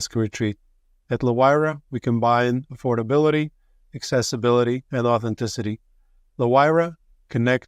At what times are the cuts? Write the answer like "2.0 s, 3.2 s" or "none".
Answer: none